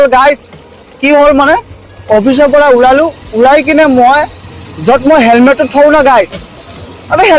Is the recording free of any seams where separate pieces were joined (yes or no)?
yes